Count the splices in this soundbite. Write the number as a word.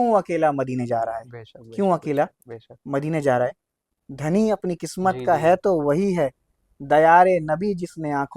one